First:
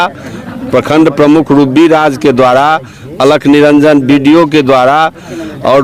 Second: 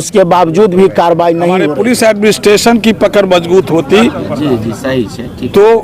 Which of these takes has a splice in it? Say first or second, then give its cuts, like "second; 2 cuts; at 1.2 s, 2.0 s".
second; 1 cut; at 1.7 s